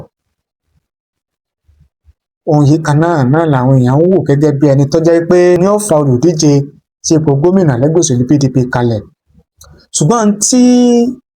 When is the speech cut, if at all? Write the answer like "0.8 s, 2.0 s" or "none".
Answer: 5.6 s